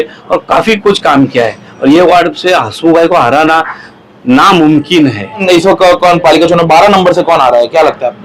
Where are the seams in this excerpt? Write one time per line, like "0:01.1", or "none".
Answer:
0:05.4